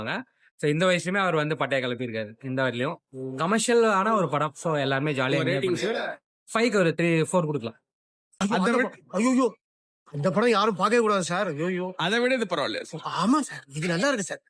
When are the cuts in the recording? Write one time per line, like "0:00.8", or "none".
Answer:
0:08.3